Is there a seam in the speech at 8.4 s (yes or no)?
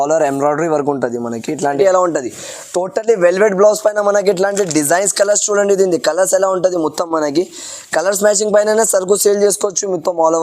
no